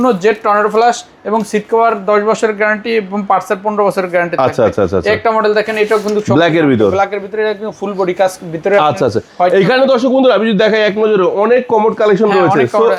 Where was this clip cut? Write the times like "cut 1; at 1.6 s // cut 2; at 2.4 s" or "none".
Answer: none